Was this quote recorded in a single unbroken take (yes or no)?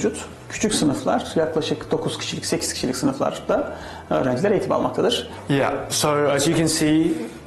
yes